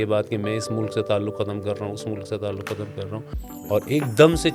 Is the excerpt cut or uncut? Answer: cut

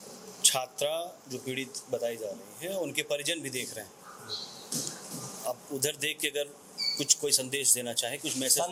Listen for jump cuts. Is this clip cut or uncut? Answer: uncut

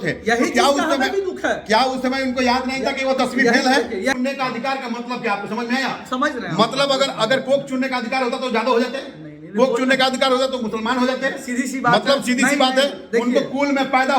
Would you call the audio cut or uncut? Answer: cut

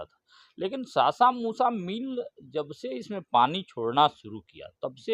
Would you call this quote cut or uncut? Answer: uncut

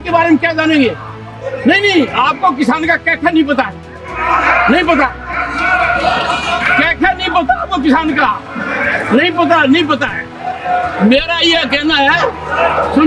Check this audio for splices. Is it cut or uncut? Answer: uncut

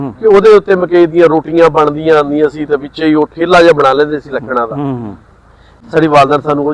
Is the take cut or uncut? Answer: cut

